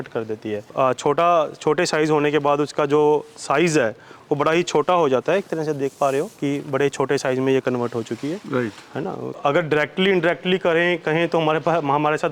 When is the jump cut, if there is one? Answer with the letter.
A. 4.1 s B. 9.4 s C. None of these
B